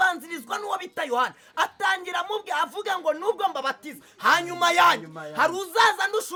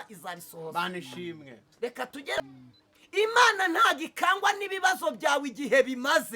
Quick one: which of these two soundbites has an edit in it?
second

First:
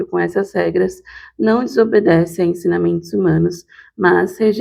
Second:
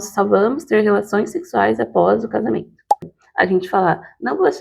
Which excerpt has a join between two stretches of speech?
second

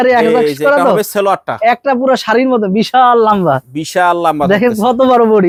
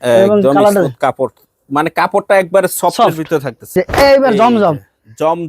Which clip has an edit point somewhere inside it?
second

